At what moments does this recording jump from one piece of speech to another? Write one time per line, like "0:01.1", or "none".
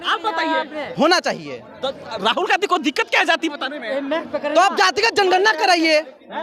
none